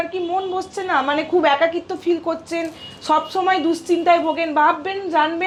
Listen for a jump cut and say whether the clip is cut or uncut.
uncut